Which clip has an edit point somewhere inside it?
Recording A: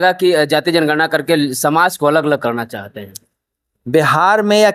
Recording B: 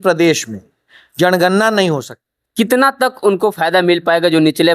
B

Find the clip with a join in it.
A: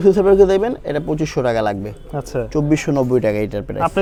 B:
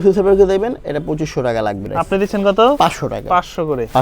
B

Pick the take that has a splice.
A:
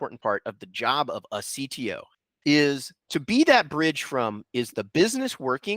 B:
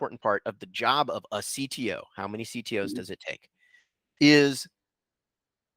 A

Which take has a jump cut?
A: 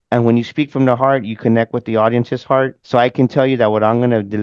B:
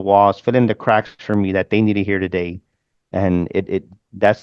A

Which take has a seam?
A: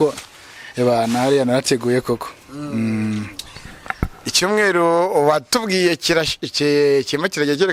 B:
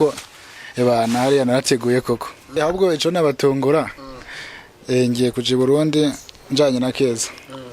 B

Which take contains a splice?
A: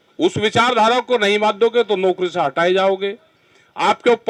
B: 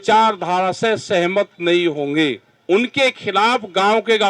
B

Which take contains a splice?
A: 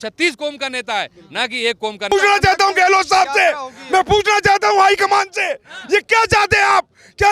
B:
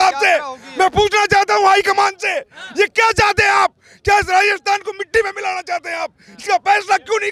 A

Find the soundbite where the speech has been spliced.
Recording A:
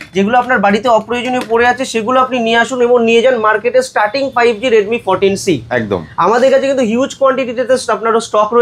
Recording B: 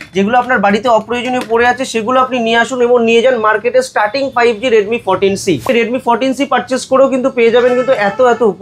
B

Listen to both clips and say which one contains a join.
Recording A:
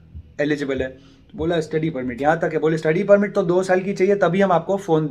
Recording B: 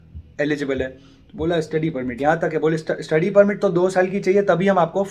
A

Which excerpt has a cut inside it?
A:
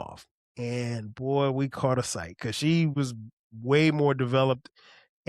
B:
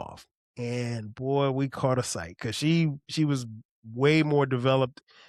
A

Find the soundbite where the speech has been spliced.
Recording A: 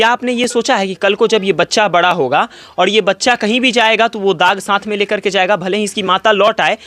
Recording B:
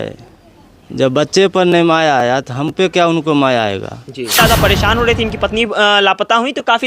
B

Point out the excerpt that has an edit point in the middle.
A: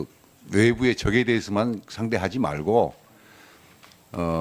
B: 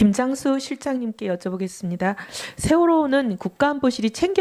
A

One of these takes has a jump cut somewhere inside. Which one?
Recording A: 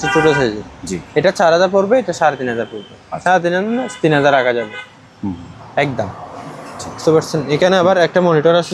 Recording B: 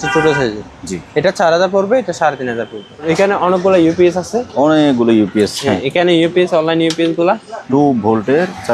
B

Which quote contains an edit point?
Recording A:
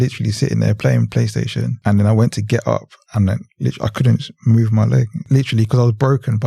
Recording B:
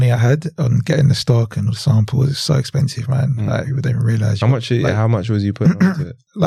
A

